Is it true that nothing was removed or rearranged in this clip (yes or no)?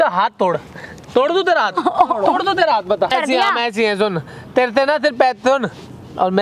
no